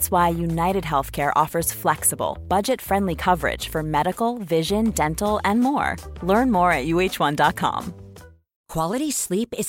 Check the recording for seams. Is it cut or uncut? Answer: uncut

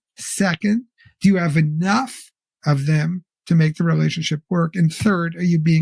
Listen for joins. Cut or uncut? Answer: uncut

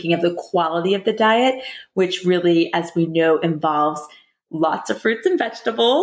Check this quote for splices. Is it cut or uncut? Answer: uncut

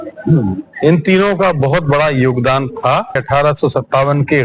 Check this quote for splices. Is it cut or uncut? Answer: cut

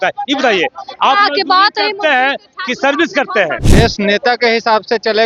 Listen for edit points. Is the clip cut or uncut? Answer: cut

